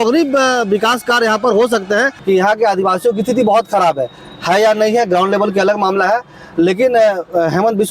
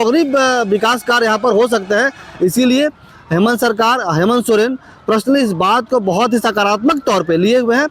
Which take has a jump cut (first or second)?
first